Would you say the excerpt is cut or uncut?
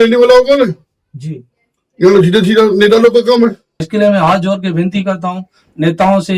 cut